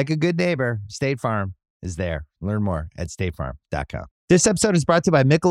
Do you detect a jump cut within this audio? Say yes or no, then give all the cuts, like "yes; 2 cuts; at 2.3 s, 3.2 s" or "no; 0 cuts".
yes; 1 cut; at 4.1 s